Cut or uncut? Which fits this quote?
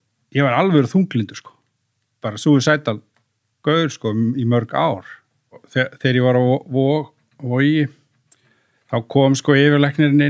cut